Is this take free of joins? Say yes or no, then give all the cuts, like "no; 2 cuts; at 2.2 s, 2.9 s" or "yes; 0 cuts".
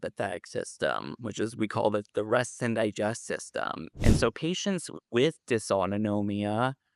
no; 1 cut; at 3.9 s